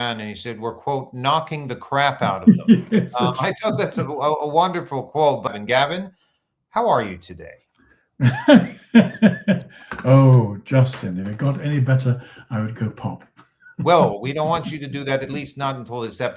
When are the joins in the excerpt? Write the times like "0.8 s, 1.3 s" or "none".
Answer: 5.5 s